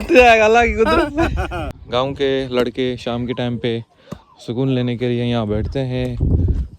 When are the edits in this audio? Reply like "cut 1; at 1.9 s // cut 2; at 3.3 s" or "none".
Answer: cut 1; at 1.8 s